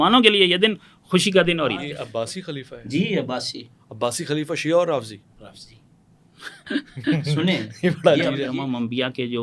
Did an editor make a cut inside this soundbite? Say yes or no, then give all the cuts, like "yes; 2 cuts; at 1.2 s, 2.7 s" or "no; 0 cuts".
yes; 2 cuts; at 2.0 s, 8.5 s